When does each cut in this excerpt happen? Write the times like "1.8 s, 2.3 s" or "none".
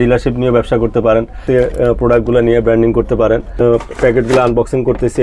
1.4 s, 3.6 s